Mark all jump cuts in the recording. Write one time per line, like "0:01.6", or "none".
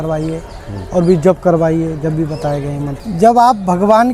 0:03.0

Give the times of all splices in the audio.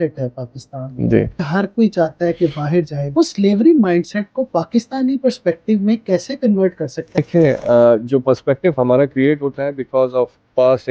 0:01.5
0:03.0
0:07.2

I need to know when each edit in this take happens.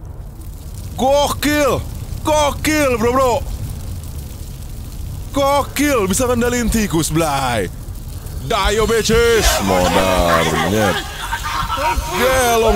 none

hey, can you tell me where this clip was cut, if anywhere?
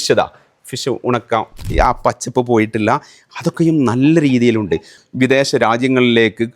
0:01.5
0:05.0

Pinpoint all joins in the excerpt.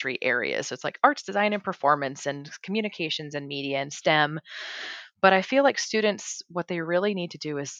none

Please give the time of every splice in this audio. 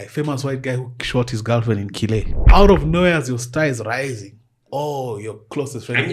0:02.3

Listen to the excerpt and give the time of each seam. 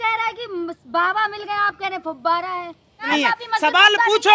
0:03.1

